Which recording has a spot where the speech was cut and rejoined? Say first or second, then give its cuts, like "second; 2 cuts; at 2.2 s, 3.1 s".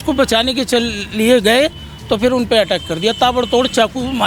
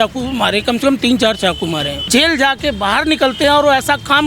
second; 1 cut; at 2.0 s